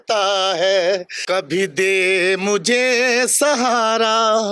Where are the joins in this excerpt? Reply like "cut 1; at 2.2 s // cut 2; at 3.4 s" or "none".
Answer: cut 1; at 1.1 s